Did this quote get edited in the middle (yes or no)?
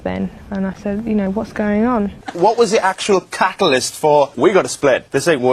yes